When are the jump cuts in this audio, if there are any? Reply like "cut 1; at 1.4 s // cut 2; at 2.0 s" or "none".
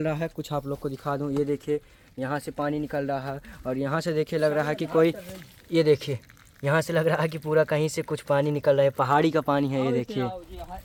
none